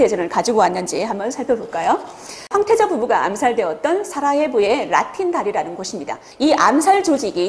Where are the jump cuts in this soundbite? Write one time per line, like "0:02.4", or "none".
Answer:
0:06.2

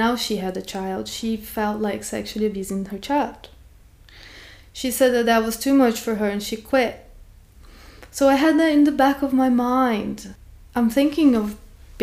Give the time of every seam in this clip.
0:10.2

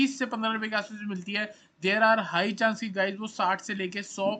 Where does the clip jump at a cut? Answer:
none

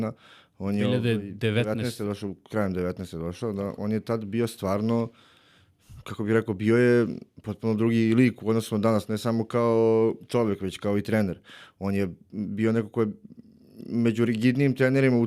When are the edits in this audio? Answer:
none

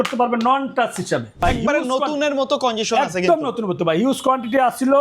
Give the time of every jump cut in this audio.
0:01.4

